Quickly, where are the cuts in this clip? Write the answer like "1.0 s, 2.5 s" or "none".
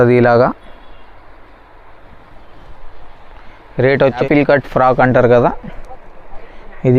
4.2 s